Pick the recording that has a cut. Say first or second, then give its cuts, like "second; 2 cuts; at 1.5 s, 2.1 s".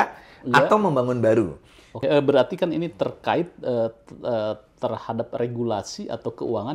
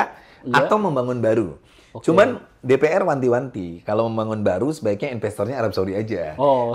first; 1 cut; at 2.0 s